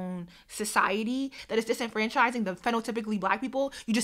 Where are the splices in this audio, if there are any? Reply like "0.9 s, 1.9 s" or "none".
1.4 s